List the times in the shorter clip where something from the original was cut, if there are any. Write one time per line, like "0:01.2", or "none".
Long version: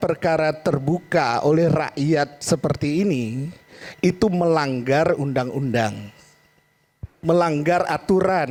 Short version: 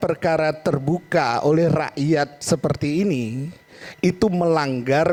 none